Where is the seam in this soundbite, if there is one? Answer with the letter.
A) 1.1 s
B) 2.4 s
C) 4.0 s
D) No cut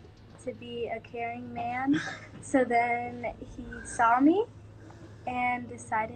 B